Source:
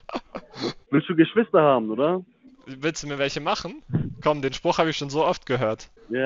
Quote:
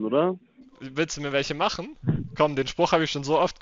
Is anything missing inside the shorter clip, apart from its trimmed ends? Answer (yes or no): no